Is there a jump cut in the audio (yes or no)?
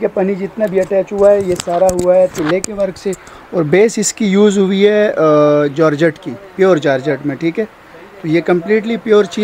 no